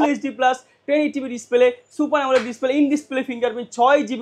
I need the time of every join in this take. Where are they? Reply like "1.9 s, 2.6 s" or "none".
none